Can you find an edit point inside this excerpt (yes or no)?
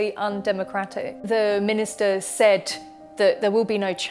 yes